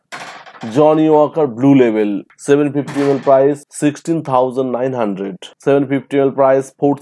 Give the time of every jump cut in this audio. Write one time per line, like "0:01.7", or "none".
0:05.5